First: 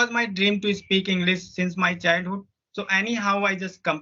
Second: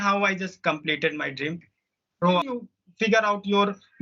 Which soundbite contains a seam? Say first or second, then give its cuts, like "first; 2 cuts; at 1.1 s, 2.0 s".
second; 1 cut; at 2.4 s